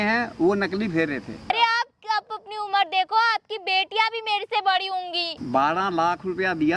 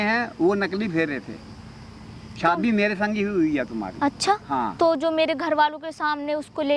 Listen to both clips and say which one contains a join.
first; 2 cuts; at 1.5 s, 5.3 s

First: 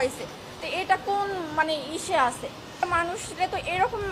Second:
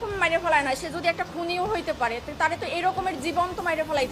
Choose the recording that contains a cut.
first; 1 cut; at 2.7 s

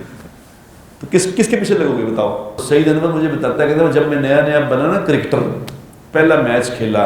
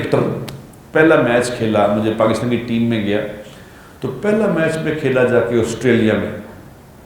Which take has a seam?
first; 1 cut; at 2.5 s

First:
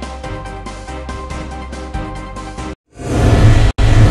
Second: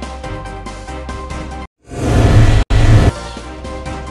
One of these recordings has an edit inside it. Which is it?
second; 1 cut; at 1.6 s

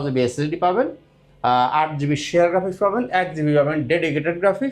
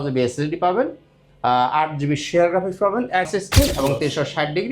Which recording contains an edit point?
second; 1 cut; at 3.3 s

